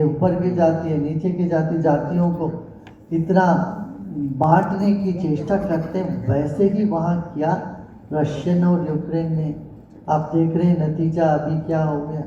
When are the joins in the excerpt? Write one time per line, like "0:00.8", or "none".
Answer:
none